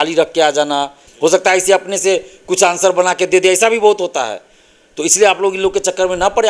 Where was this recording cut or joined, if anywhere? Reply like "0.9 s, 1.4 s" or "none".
1.0 s